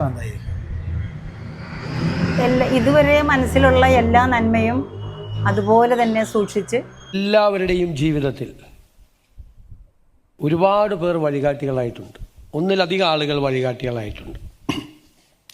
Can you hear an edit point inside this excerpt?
yes; 1 cut; at 7.2 s

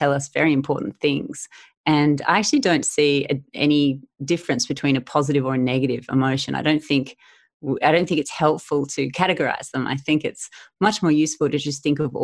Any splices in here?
no; 0 cuts

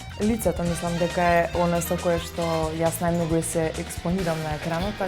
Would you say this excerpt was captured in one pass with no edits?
yes; 0 cuts

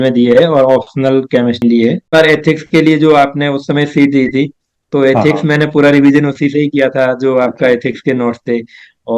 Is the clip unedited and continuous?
no; 1 cut; at 1.6 s

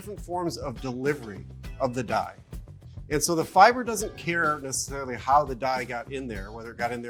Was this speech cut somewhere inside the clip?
no; 0 cuts

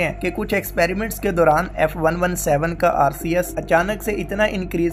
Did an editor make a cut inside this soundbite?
no; 0 cuts

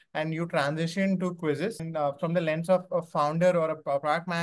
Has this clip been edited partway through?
yes; 1 cut; at 1.9 s

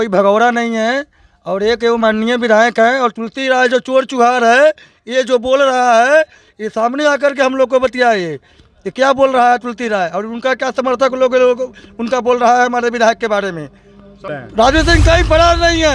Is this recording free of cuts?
no; 1 cut; at 14.3 s

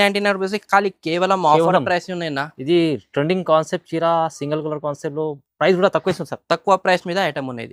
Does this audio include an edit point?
no; 0 cuts

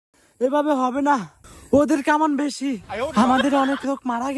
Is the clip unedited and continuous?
yes; 0 cuts

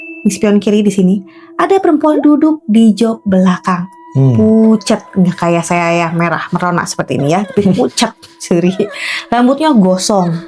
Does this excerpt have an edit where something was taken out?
no; 0 cuts

